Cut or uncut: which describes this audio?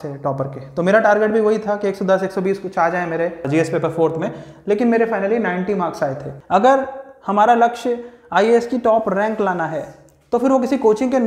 cut